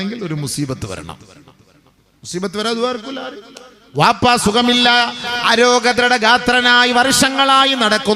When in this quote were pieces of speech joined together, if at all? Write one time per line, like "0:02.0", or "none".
none